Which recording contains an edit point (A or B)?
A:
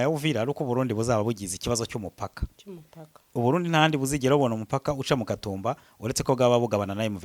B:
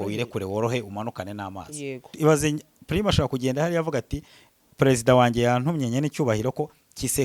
B